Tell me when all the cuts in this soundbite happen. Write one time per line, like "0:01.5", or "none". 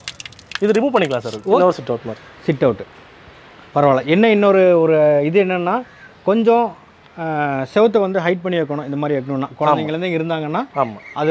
0:01.6